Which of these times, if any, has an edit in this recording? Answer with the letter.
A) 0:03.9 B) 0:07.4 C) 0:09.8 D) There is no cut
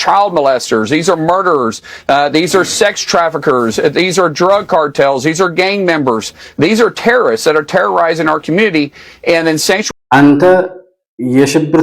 C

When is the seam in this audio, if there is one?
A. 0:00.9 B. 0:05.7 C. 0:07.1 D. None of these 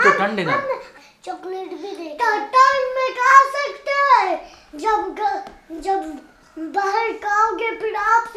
A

